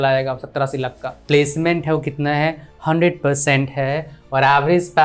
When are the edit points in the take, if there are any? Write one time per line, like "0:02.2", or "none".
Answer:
0:01.1